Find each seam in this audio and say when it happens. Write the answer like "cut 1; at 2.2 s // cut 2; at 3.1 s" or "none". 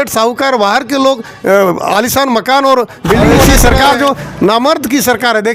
cut 1; at 3.5 s